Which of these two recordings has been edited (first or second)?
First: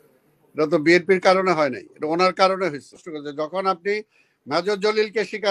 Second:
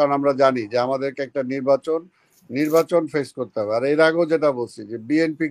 first